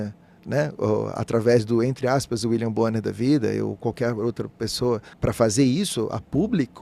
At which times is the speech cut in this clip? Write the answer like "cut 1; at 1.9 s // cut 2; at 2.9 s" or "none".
cut 1; at 5.1 s